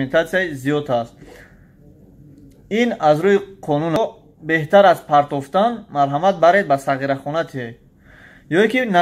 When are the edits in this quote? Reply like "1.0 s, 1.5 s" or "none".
4.0 s